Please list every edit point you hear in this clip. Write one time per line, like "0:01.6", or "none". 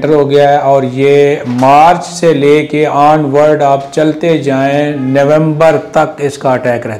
none

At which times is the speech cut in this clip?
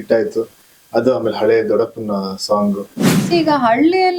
0:03.2

